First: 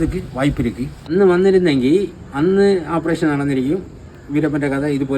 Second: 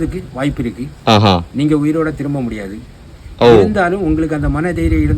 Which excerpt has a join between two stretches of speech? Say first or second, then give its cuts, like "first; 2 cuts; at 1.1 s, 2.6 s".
first; 1 cut; at 1.0 s